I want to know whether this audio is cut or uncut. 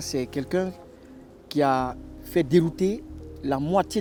uncut